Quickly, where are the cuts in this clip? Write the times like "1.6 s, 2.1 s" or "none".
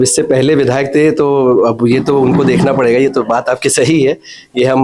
none